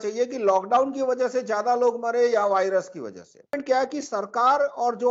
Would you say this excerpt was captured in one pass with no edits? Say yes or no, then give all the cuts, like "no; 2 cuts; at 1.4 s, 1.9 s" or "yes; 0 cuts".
no; 1 cut; at 3.5 s